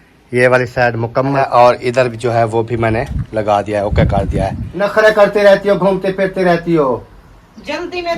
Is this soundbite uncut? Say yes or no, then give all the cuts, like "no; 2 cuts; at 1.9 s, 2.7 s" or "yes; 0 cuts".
no; 2 cuts; at 1.5 s, 4.7 s